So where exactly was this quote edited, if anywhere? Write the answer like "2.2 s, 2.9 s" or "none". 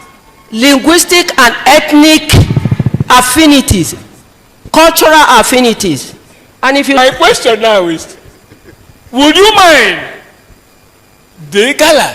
7.0 s